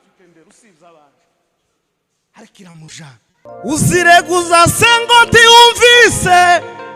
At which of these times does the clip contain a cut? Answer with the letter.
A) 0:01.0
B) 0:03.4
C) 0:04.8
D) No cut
B